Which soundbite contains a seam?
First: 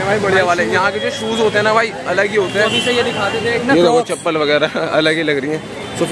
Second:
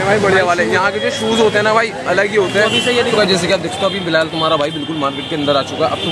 second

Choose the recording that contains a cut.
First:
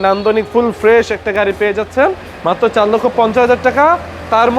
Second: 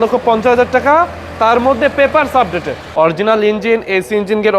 second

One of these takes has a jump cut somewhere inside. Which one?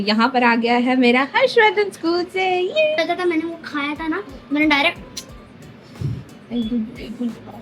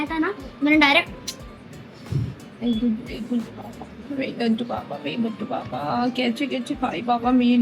first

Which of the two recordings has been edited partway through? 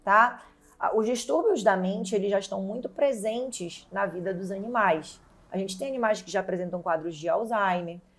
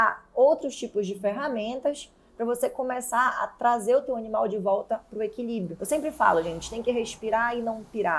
second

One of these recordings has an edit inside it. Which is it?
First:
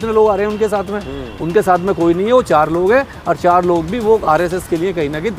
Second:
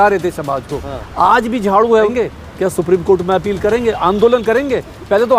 second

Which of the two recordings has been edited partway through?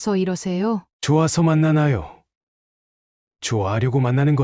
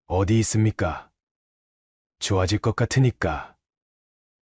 first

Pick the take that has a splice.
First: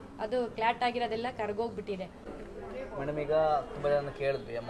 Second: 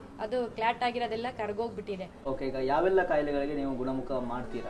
second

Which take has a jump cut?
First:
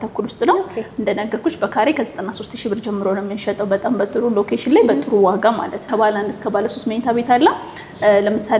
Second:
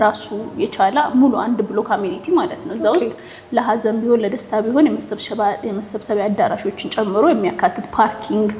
first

